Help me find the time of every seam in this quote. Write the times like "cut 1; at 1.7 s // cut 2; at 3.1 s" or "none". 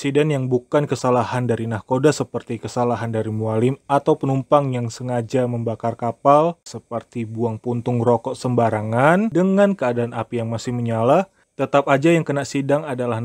none